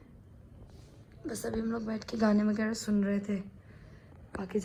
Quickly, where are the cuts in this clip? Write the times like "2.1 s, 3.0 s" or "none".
none